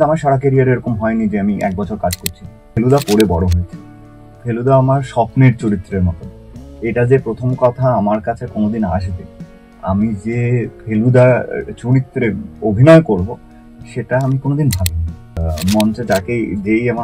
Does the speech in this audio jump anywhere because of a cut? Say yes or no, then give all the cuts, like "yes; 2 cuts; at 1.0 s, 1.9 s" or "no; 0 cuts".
yes; 2 cuts; at 2.7 s, 15.4 s